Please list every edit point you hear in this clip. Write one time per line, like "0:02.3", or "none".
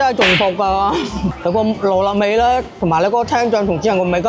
0:01.3